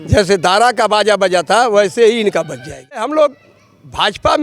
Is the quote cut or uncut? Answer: cut